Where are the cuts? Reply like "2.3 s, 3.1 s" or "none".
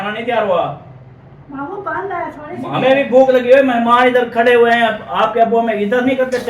none